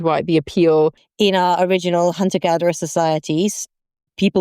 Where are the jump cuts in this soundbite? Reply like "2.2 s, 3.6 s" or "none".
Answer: 1.0 s